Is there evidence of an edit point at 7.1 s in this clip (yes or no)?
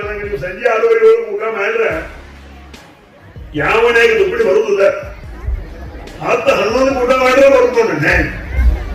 no